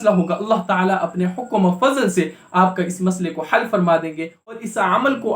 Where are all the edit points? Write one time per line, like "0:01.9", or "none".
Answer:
0:04.3